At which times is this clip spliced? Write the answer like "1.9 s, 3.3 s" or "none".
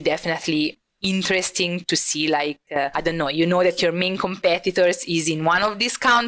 none